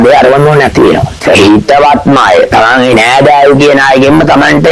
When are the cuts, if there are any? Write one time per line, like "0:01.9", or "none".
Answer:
0:01.1